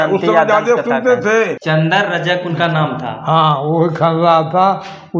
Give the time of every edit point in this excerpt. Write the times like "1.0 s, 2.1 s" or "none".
1.6 s